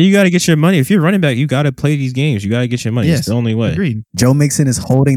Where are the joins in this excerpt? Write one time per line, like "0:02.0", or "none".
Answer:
0:04.1

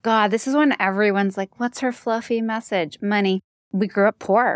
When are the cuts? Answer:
0:03.6

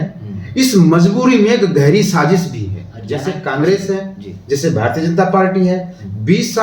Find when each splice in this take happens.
0:03.4

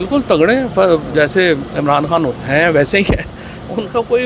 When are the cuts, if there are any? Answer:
none

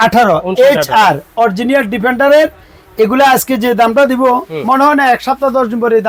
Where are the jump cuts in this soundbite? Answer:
none

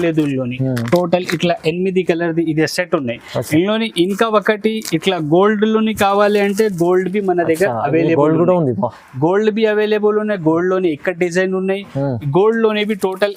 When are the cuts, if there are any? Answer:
none

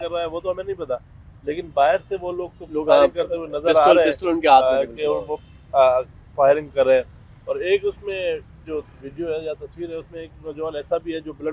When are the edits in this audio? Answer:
none

